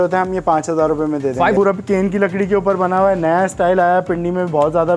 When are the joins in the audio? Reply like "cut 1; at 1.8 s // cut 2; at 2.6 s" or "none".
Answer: cut 1; at 1.6 s